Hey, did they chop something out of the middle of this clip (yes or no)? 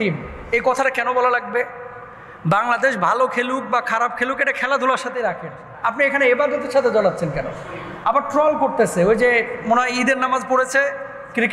no